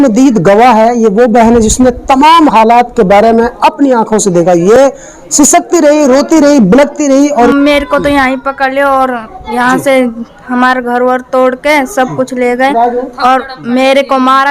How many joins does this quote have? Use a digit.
2